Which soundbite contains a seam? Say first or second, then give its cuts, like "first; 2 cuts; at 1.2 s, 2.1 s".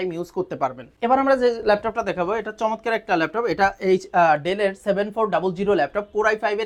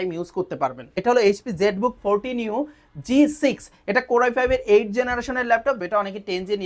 second; 2 cuts; at 0.9 s, 5.8 s